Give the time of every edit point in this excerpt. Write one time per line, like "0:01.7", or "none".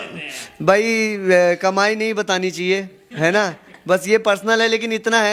none